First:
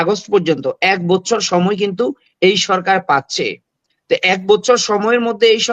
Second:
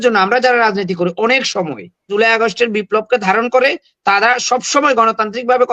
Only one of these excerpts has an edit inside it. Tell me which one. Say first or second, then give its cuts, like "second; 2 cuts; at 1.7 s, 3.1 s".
second; 1 cut; at 2.1 s